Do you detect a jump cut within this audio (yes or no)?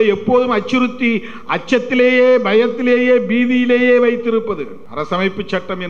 yes